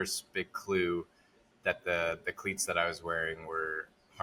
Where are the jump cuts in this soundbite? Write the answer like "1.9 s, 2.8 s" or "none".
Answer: none